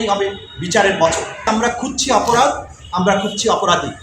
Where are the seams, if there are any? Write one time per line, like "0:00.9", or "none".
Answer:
0:01.4